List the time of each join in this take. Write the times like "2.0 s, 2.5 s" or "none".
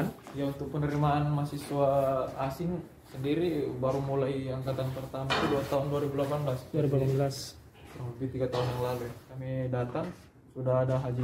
9.3 s